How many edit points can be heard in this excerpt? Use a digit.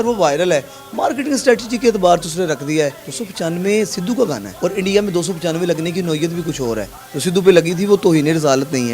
2